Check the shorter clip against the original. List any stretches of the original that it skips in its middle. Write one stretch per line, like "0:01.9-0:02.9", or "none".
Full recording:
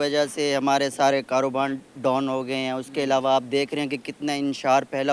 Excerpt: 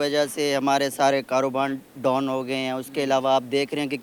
none